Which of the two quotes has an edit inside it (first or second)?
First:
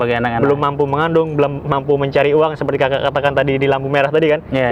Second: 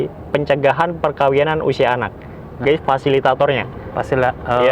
second